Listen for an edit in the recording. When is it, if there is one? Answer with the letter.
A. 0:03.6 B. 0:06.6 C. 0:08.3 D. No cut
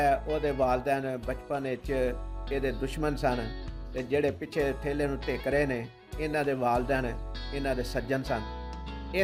D